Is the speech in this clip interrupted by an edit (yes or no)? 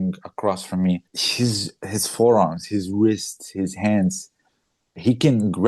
yes